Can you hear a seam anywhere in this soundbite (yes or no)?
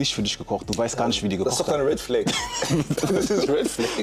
no